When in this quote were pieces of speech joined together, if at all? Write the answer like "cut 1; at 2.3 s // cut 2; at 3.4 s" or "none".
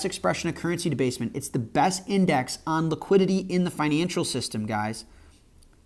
none